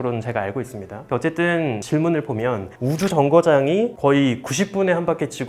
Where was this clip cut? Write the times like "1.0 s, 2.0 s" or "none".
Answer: none

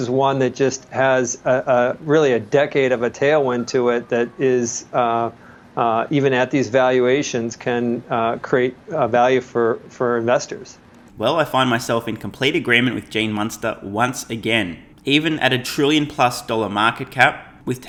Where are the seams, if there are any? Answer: none

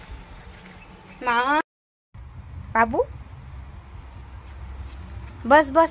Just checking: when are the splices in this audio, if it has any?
1.6 s

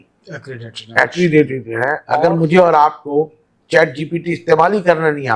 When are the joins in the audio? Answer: 2.0 s

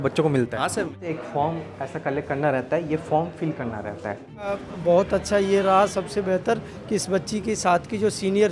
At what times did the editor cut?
0.9 s, 4.4 s

